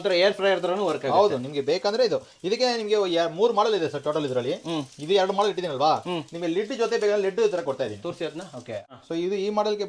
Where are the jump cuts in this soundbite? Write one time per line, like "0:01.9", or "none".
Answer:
none